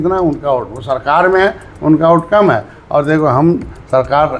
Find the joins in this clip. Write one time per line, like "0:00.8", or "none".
none